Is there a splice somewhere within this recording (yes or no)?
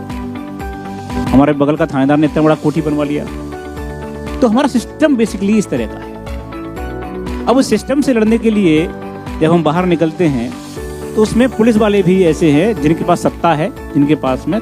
yes